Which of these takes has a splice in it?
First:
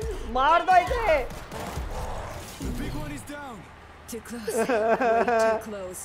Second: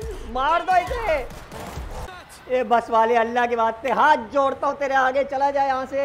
second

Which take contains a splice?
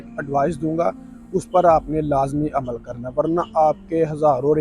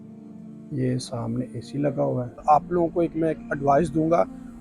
second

